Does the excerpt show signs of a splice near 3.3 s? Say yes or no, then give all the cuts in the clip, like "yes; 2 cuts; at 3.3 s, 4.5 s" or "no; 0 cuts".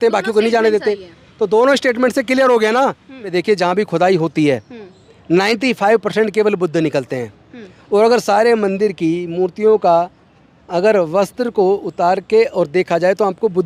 yes; 1 cut; at 3.3 s